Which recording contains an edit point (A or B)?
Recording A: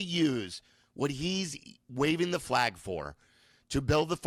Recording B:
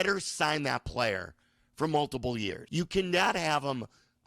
B